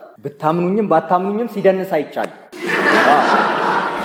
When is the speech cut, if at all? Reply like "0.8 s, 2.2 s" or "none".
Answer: none